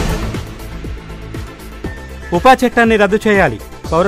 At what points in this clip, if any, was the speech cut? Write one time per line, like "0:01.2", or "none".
none

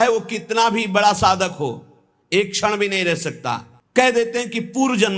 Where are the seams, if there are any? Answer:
0:03.8

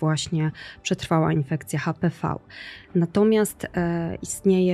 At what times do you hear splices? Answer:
none

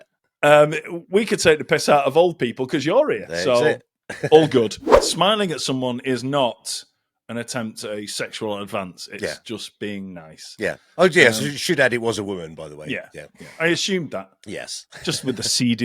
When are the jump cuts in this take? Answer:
0:04.9

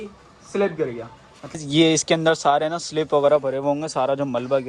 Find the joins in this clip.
0:01.6

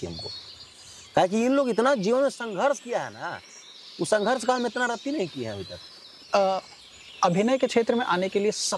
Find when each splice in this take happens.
none

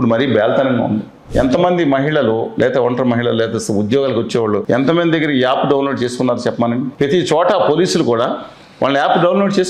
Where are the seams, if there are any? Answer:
0:01.2
0:04.6
0:06.9

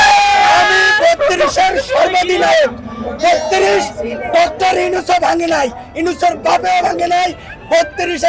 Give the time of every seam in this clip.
none

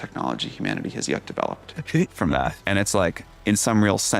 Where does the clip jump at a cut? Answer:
0:01.6

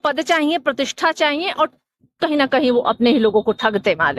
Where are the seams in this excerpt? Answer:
none

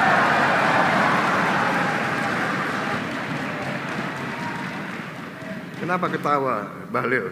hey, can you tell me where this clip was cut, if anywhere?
0:03.0

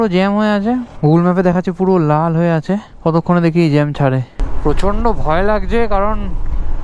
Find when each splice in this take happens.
0:04.3

